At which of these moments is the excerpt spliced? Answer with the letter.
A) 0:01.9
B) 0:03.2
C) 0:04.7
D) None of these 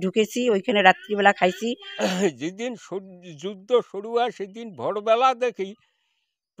A